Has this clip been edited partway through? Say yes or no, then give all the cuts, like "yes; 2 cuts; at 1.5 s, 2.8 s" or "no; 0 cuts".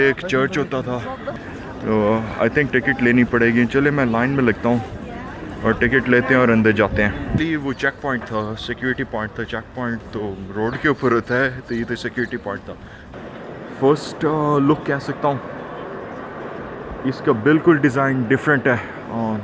yes; 3 cuts; at 1.3 s, 7.4 s, 13.1 s